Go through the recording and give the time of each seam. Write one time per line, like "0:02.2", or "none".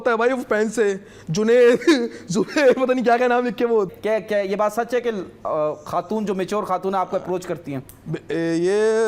0:03.9